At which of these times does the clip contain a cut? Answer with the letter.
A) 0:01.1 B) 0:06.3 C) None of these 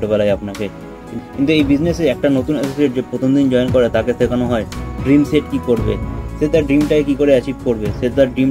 A